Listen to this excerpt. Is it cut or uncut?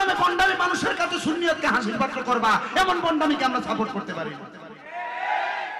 uncut